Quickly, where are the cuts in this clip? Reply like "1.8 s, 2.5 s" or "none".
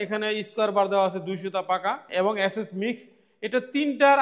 2.0 s